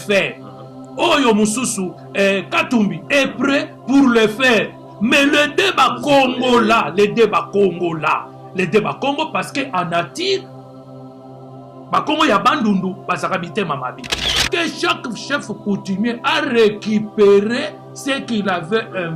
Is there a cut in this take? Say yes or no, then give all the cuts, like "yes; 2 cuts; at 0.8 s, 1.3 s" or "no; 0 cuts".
yes; 1 cut; at 14.3 s